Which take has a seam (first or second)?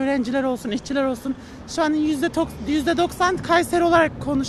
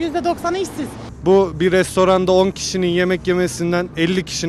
second